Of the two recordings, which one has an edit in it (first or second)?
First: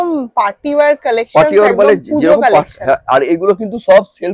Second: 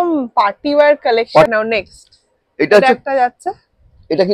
second